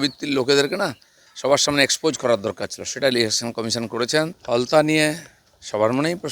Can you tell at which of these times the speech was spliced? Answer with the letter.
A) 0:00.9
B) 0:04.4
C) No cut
B